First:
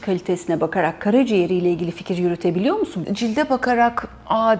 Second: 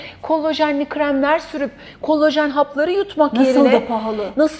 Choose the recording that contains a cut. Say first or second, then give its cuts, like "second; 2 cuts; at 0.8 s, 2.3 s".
first; 1 cut; at 2.9 s